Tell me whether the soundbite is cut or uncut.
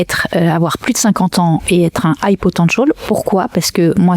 uncut